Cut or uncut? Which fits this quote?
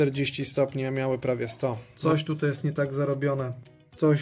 cut